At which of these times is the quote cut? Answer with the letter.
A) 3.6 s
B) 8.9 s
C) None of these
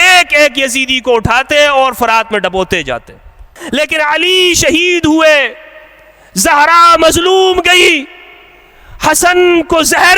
A